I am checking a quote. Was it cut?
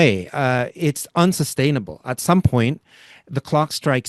no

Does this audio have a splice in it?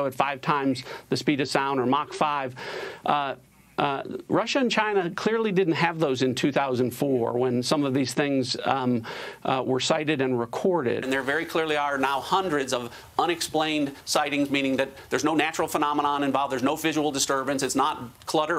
no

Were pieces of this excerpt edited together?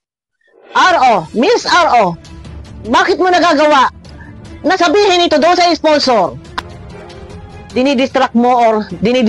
yes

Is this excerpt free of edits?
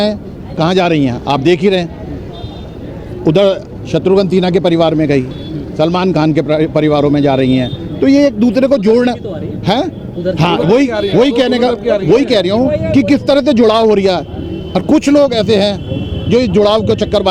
yes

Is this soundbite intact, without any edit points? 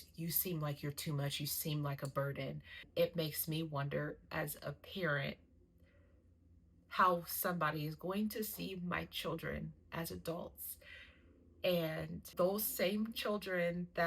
no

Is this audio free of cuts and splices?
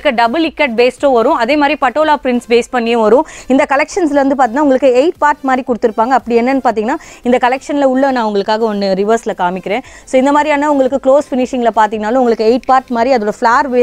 yes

